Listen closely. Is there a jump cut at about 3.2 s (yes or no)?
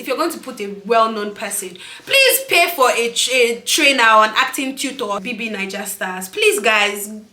no